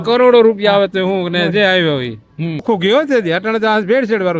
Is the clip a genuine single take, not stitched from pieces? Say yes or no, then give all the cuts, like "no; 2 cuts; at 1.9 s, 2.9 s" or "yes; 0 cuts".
no; 1 cut; at 2.6 s